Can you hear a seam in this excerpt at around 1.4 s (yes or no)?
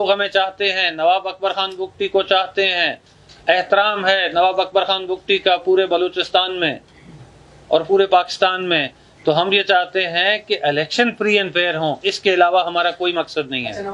no